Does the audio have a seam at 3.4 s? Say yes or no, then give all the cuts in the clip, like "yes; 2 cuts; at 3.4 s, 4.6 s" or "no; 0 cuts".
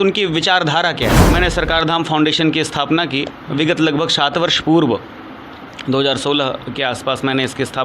no; 1 cut; at 1.2 s